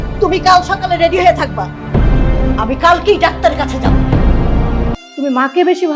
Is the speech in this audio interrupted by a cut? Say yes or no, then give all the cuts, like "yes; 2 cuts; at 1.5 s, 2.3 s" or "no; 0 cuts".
yes; 1 cut; at 4.9 s